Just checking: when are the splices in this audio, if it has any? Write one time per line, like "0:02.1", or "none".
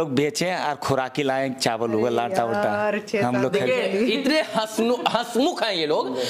none